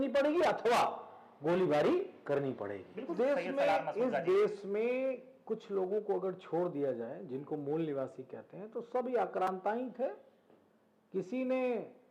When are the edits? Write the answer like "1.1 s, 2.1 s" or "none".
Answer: 3.1 s

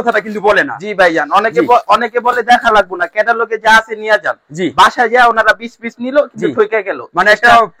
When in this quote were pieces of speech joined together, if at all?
none

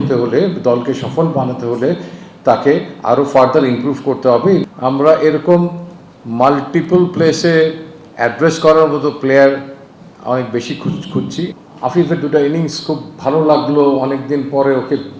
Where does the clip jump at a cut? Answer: 4.6 s, 11.6 s

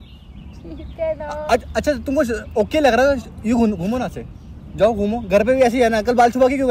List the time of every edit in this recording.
none

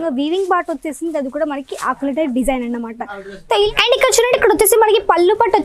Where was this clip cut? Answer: 3.7 s

